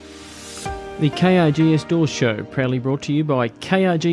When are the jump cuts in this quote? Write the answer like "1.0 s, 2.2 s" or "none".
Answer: 0.9 s